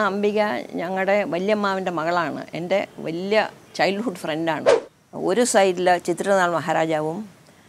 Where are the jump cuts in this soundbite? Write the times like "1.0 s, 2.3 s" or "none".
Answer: 4.7 s